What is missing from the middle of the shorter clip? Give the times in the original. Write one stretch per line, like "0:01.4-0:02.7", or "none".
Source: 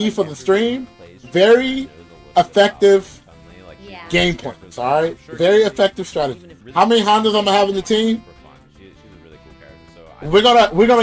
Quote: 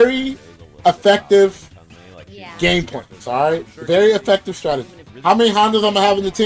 none